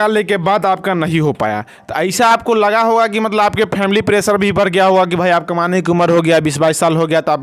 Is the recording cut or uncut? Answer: uncut